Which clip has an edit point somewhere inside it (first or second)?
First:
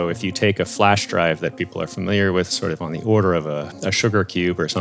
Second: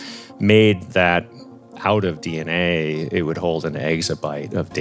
first